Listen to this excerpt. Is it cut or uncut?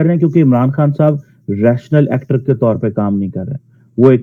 uncut